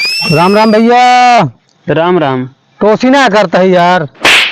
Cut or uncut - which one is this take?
uncut